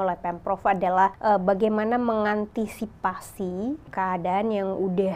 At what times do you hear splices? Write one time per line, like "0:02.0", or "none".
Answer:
0:01.2
0:03.8